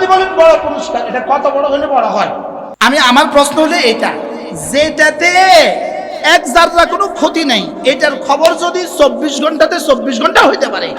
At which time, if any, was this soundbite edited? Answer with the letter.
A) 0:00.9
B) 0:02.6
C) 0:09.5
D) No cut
B